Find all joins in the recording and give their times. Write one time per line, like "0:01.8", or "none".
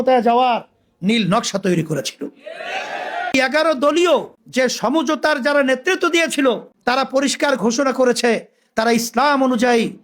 0:03.3
0:04.4